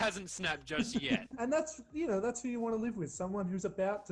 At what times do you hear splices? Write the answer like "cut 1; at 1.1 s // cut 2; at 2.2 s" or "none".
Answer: none